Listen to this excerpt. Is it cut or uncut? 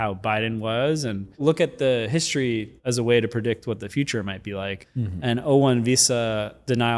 cut